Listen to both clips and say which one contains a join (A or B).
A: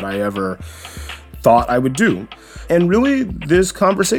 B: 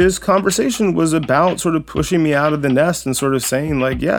A